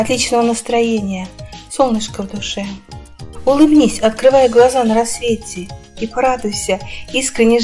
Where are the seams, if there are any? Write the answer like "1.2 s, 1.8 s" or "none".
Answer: 2.8 s